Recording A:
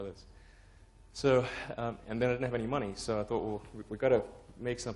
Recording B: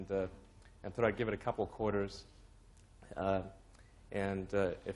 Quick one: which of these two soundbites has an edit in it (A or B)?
B